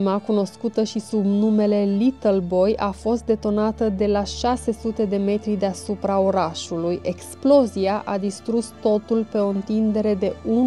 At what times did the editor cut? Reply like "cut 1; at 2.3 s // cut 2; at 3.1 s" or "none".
none